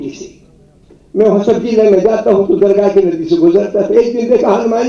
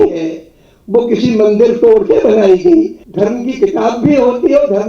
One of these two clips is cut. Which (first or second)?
second